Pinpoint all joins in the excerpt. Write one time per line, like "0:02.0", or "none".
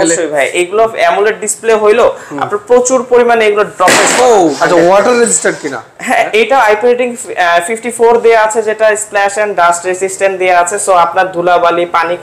0:04.6